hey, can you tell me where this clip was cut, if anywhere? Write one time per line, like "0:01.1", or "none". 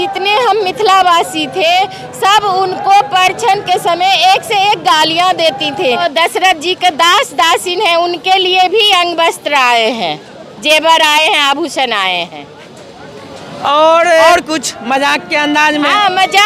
0:06.0
0:14.3